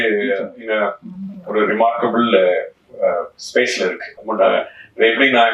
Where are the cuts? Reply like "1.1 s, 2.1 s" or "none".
4.1 s

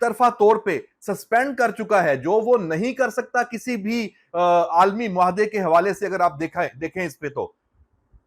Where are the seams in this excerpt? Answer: none

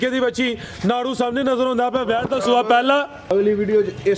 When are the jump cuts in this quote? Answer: 3.2 s

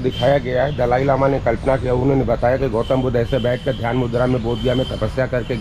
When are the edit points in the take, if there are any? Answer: none

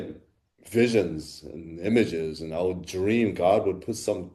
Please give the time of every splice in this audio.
none

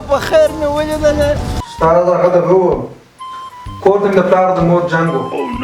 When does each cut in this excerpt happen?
1.6 s

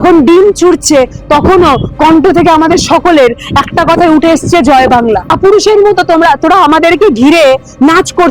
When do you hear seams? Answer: 5.3 s

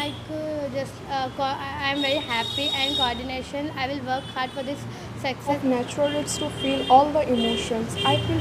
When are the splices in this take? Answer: 5.6 s

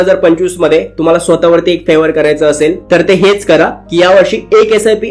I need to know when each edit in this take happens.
none

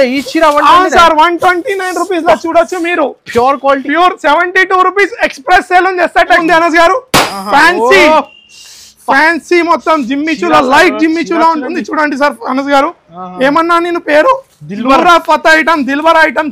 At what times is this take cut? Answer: 6.4 s

